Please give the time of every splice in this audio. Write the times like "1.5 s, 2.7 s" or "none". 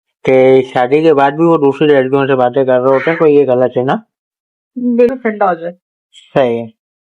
5.1 s

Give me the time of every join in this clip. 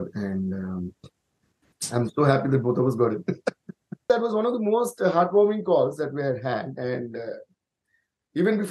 4.0 s

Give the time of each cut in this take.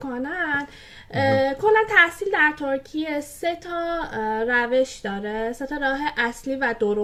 none

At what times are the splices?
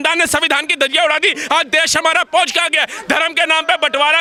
none

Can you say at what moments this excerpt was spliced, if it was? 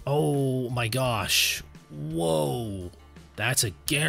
none

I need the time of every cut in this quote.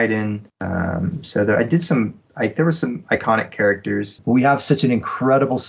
4.2 s

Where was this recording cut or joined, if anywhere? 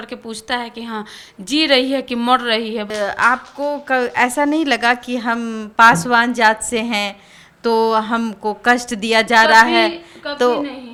none

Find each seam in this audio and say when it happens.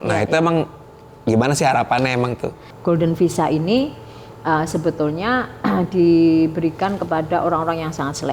2.6 s

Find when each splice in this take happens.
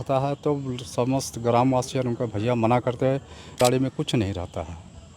3.6 s

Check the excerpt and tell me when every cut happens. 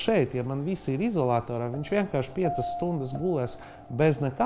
none

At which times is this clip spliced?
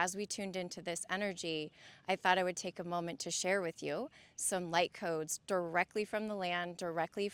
none

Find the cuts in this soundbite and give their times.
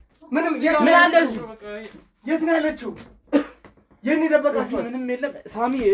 none

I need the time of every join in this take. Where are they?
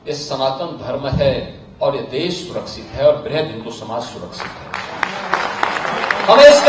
none

